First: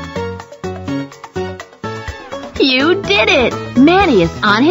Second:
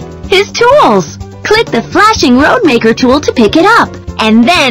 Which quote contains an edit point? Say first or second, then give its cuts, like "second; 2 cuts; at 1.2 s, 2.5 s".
first; 1 cut; at 2.5 s